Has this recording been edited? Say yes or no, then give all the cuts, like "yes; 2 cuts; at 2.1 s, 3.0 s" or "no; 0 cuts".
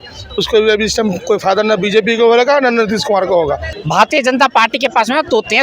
yes; 1 cut; at 3.7 s